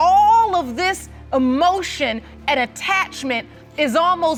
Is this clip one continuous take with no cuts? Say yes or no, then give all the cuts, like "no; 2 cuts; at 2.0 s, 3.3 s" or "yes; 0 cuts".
yes; 0 cuts